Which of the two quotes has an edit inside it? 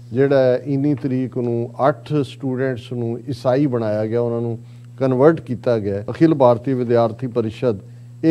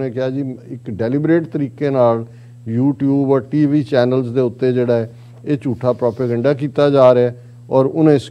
first; 1 cut; at 6.0 s

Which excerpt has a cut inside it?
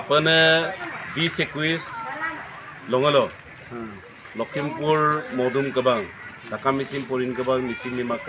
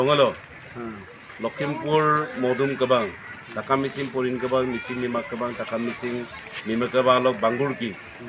first; 1 cut; at 0.9 s

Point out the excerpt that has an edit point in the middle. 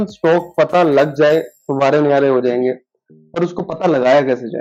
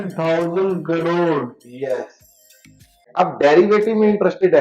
second; 1 cut; at 3.1 s

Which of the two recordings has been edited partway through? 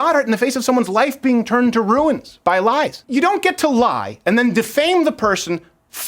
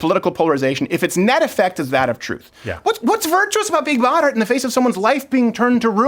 first; 1 cut; at 3.0 s

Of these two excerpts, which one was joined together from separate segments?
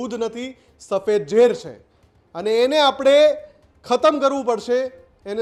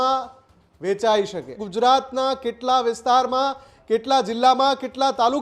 second; 1 cut; at 1.6 s

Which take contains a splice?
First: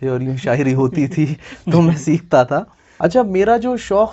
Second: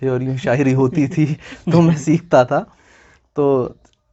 first; 1 cut; at 2.8 s

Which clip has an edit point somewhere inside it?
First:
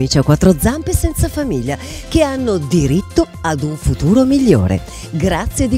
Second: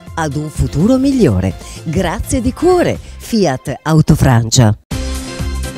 second; 1 cut; at 4.8 s

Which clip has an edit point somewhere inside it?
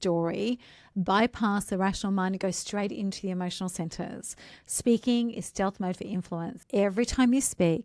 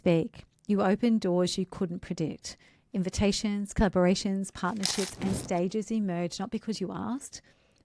first; 1 cut; at 6.6 s

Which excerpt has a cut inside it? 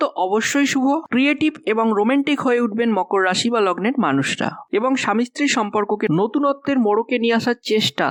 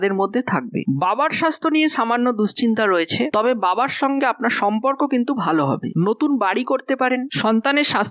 second; 2 cuts; at 0.8 s, 5.9 s

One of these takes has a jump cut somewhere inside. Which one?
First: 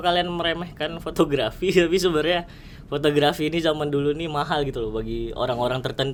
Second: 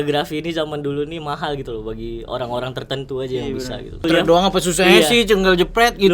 second; 1 cut; at 4.0 s

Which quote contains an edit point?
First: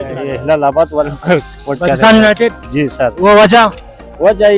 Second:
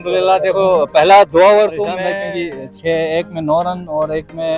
second; 1 cut; at 2.0 s

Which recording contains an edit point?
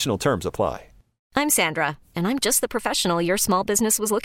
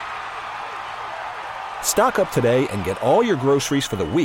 first; 1 cut; at 1.3 s

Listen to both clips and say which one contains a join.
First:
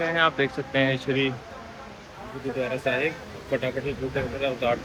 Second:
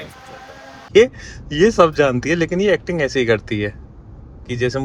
second; 1 cut; at 0.9 s

